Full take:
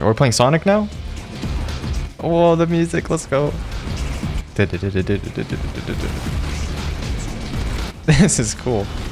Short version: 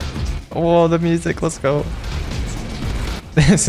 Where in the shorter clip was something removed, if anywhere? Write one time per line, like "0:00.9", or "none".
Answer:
0:02.1